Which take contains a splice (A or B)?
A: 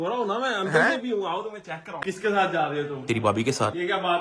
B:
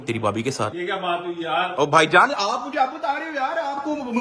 A